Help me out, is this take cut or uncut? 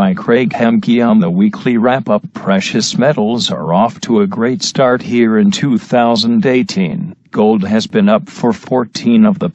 uncut